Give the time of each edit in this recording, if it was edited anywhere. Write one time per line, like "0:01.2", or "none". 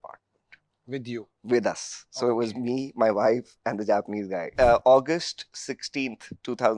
0:04.4